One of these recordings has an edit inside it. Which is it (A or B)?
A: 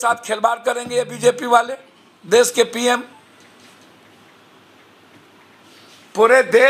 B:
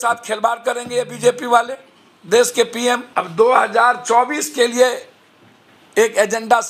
B